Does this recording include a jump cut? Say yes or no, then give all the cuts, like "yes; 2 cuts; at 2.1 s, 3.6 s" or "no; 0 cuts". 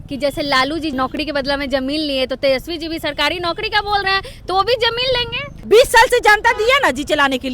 yes; 2 cuts; at 0.9 s, 5.5 s